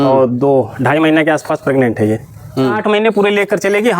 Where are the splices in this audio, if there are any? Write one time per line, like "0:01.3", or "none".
0:02.8